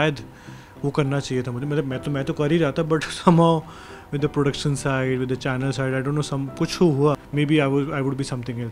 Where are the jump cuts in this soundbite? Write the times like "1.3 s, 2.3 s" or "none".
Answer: 7.2 s